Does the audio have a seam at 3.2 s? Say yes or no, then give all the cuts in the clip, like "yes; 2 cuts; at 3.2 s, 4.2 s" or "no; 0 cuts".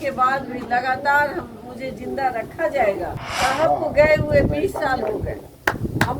yes; 1 cut; at 3.2 s